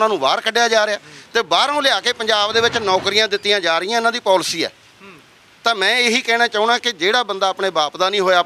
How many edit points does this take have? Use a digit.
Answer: 0